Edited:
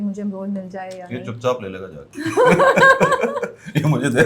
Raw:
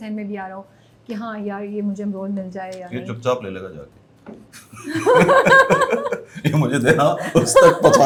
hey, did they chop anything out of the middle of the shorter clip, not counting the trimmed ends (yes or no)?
yes